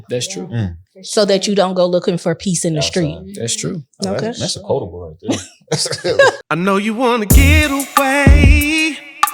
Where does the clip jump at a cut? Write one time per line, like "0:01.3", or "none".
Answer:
0:06.4